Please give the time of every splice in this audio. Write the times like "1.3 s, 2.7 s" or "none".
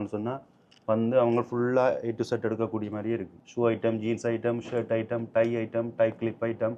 3.4 s